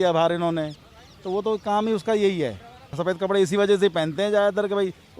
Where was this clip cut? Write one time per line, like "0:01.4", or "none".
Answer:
0:02.9